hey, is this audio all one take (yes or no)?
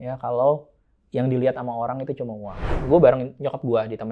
no